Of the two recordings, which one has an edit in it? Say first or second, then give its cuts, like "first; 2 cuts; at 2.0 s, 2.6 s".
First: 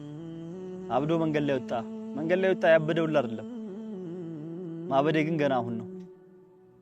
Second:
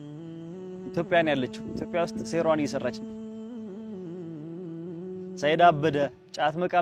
first; 3 cuts; at 0.9 s, 3.3 s, 4.9 s